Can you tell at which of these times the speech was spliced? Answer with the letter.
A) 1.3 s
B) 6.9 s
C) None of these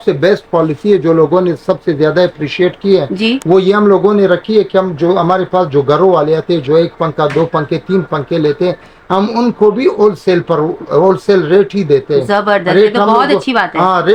C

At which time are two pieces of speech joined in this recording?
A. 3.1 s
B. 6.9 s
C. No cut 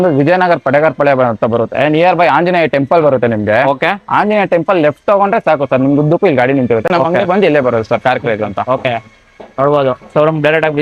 C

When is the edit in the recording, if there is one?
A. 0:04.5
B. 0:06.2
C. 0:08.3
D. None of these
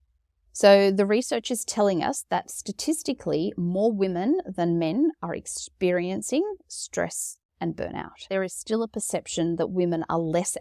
C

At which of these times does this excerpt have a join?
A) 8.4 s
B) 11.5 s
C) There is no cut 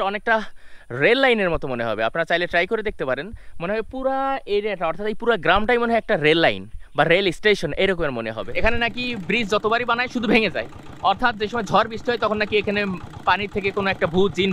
A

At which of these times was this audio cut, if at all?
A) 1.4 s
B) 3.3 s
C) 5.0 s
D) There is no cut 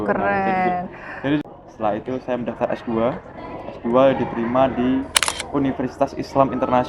A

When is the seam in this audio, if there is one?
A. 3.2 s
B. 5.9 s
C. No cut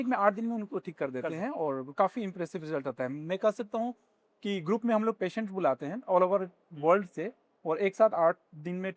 C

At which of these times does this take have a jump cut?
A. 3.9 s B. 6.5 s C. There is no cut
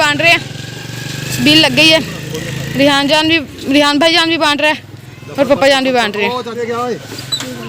B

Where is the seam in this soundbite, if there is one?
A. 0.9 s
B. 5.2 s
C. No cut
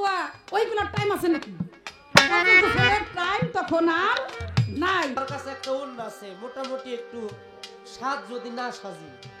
B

